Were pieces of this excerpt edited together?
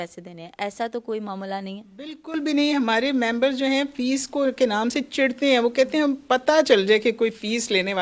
no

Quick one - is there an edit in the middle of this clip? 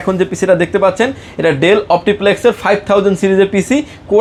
no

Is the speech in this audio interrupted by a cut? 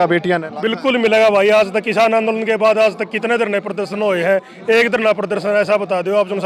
no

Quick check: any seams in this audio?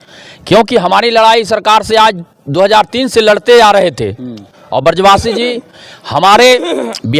no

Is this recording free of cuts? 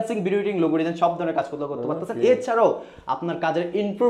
yes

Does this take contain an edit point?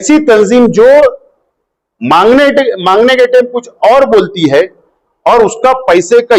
no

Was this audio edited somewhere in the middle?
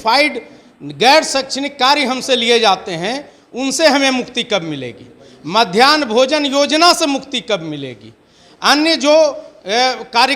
no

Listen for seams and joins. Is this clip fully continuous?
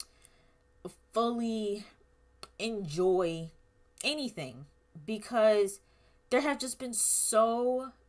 yes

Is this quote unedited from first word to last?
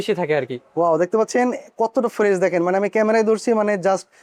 yes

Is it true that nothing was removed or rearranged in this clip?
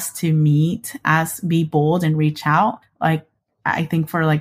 yes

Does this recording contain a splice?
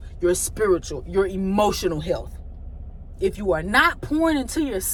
no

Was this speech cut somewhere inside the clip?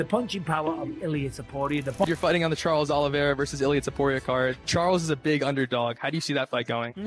yes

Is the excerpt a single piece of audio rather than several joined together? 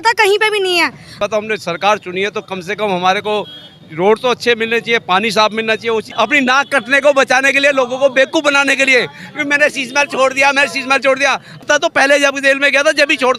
no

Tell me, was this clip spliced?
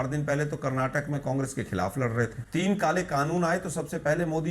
yes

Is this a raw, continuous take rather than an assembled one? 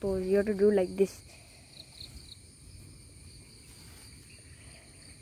yes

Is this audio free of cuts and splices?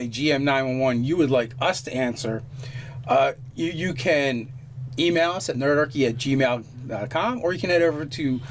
no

